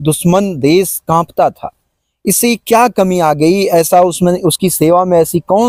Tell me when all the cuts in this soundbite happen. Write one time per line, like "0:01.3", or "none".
none